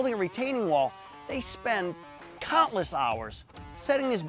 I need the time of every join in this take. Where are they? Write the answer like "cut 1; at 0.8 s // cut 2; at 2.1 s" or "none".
none